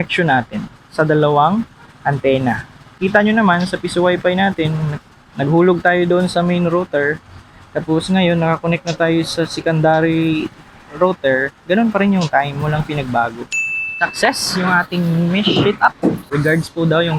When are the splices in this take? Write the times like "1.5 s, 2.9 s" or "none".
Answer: none